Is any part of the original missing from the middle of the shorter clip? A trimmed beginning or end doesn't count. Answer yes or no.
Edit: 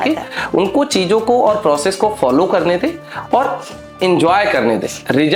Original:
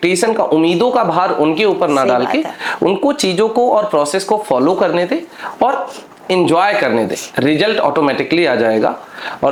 no